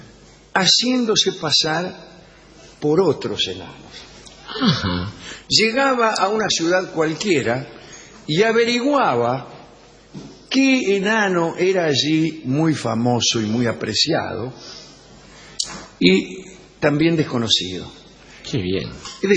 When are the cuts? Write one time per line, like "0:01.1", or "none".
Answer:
0:01.5